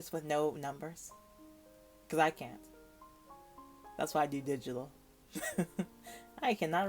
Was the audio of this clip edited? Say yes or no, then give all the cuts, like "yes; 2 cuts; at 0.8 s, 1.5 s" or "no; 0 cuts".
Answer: no; 0 cuts